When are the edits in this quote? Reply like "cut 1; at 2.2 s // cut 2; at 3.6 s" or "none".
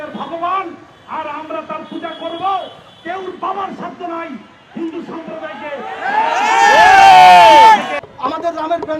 cut 1; at 8.0 s

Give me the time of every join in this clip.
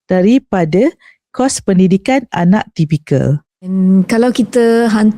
cut 1; at 3.8 s

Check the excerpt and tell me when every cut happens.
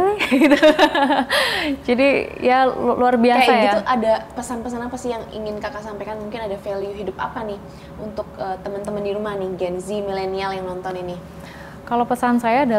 none

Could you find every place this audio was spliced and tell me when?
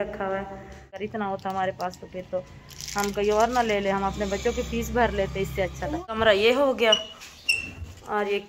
cut 1; at 1.0 s // cut 2; at 6.2 s

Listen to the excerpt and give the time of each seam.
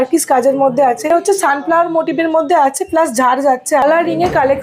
cut 1; at 1.1 s // cut 2; at 3.8 s

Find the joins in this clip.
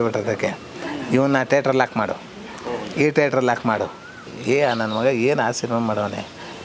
cut 1; at 4.3 s

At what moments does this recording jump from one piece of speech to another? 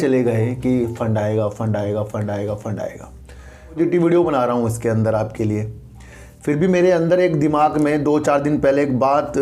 cut 1; at 3.8 s

